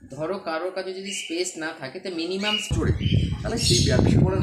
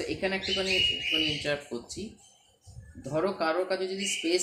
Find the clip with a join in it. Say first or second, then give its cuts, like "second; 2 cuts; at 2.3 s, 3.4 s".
first; 1 cut; at 2.7 s